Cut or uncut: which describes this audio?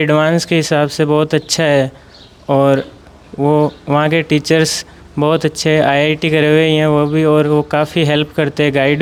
uncut